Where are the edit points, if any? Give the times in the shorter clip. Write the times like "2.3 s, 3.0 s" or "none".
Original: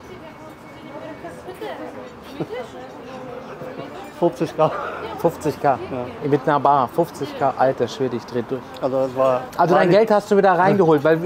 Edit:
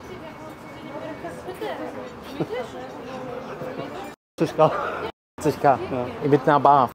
none